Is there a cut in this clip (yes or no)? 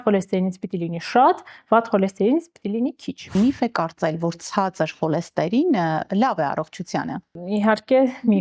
yes